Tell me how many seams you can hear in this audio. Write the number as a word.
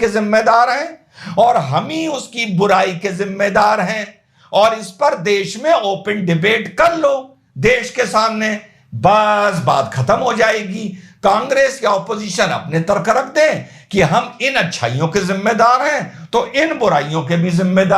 zero